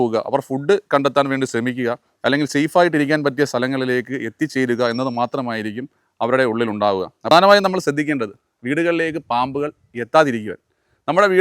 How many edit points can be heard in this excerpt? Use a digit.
1